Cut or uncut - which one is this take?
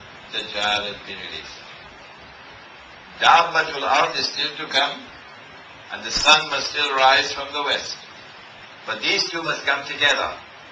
uncut